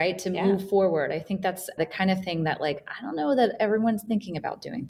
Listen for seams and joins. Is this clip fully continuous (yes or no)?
yes